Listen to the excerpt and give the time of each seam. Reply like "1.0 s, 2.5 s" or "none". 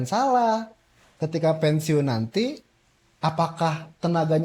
none